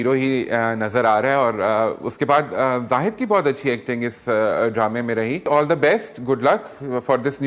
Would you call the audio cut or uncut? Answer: cut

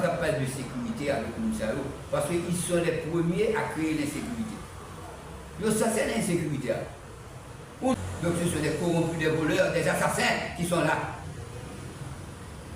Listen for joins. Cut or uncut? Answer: cut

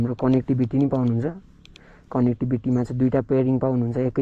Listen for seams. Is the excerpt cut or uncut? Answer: uncut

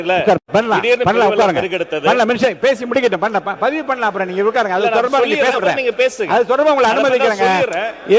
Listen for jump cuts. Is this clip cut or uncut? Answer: uncut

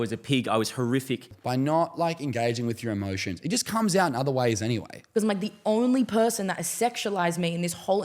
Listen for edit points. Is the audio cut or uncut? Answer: cut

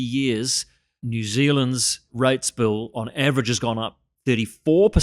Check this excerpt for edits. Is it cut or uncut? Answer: cut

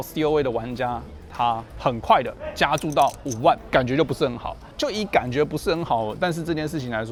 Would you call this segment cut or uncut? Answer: uncut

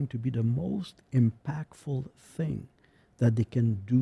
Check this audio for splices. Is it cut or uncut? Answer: uncut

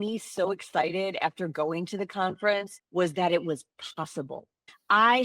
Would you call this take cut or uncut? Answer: cut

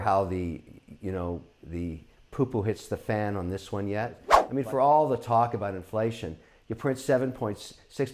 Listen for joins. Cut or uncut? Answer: cut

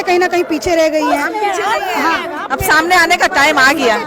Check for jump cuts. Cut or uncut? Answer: uncut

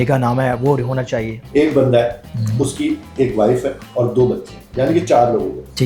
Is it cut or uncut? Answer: cut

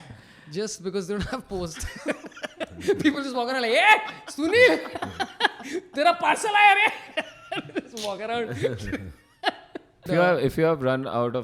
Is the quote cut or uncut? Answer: cut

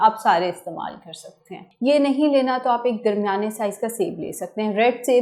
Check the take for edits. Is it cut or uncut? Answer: uncut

